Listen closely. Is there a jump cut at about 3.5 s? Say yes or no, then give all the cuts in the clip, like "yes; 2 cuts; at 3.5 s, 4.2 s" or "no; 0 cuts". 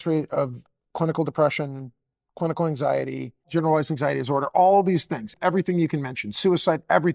yes; 2 cuts; at 3.5 s, 5.3 s